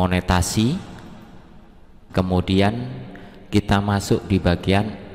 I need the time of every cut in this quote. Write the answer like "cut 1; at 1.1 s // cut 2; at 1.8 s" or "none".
cut 1; at 2.0 s